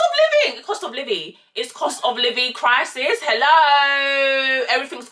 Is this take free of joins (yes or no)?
yes